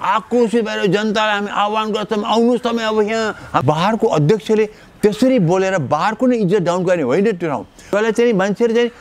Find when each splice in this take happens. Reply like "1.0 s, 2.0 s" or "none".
3.5 s, 7.9 s